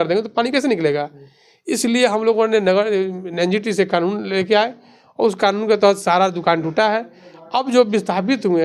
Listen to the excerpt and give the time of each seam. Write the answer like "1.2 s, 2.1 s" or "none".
none